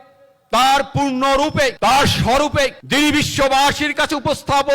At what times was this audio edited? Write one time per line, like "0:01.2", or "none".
0:01.7
0:02.8